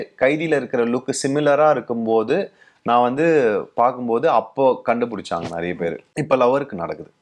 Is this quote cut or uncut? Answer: uncut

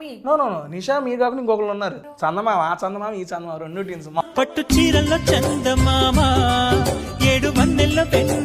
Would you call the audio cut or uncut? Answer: cut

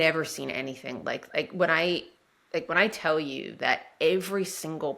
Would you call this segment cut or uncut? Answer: uncut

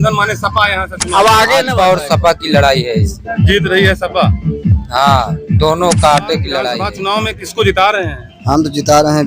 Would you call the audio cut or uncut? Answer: cut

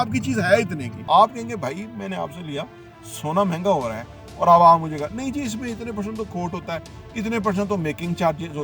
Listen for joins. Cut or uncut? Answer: cut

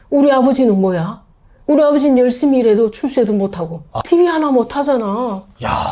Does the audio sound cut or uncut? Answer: cut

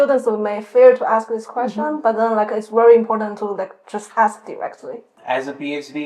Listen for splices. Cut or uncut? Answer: cut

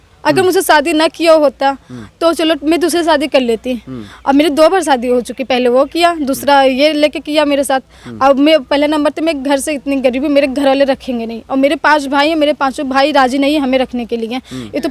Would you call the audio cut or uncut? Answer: uncut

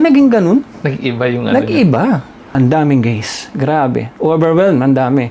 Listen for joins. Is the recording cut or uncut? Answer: cut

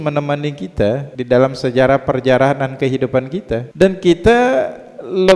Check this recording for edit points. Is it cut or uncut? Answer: cut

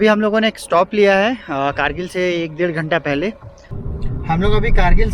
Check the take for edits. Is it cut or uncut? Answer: cut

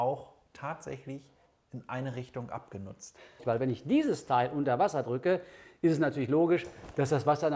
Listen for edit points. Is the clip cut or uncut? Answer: cut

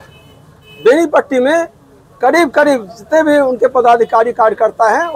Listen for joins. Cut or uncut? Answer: uncut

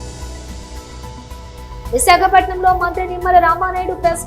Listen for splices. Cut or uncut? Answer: uncut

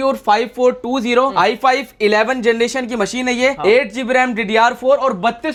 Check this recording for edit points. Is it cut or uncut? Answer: uncut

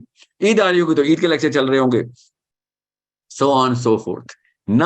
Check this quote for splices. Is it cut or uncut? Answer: uncut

